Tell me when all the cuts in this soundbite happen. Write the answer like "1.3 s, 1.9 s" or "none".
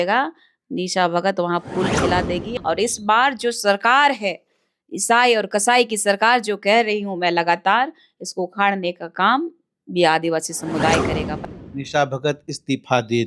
2.5 s, 11.2 s